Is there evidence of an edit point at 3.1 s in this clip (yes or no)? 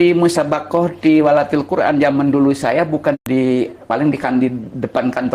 yes